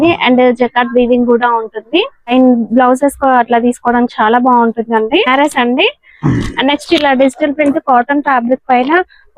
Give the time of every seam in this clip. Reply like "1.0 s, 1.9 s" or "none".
2.3 s, 5.3 s

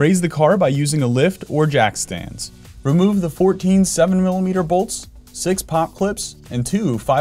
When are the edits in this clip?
none

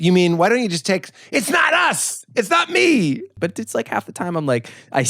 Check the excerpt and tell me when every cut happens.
3.3 s

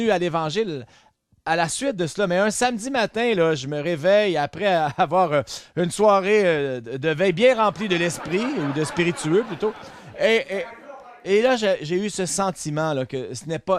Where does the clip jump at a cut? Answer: none

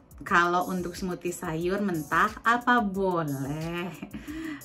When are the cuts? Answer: none

